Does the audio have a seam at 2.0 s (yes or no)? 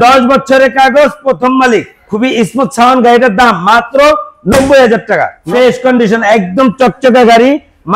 yes